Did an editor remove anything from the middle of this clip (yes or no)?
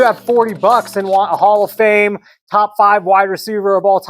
no